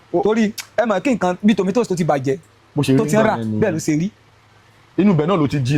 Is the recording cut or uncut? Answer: uncut